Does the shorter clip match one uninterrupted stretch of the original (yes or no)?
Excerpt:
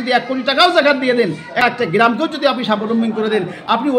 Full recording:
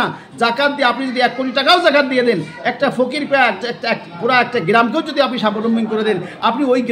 no